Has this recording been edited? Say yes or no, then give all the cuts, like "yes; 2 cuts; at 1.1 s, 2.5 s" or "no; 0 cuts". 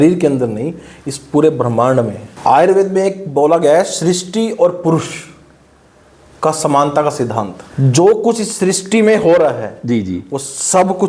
no; 0 cuts